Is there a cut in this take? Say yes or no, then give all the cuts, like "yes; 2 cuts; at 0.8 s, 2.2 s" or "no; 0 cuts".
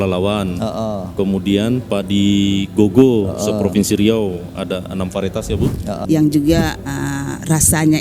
yes; 1 cut; at 6.0 s